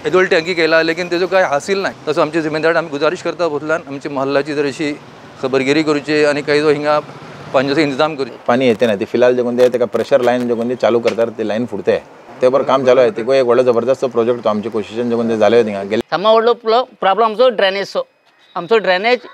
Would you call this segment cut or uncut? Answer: cut